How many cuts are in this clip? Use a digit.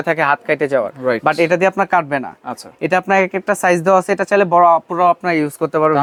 0